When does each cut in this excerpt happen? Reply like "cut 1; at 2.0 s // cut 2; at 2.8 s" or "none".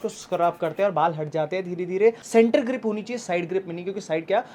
cut 1; at 2.2 s